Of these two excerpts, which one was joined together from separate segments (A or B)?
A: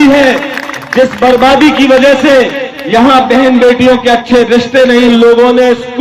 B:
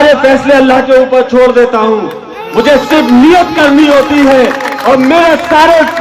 A